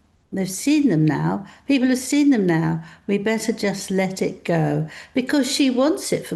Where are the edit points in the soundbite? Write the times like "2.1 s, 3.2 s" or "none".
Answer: none